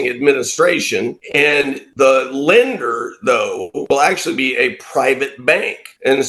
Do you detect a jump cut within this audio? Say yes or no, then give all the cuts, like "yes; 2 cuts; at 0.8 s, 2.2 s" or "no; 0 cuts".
no; 0 cuts